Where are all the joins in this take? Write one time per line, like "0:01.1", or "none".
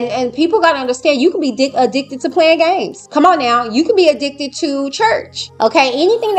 0:03.0
0:05.4